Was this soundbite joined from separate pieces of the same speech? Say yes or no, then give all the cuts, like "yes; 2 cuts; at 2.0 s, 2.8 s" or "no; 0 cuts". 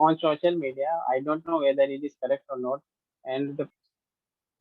yes; 1 cut; at 3.6 s